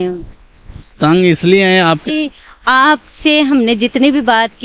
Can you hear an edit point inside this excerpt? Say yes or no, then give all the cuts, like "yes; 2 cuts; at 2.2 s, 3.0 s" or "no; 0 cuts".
yes; 1 cut; at 2.0 s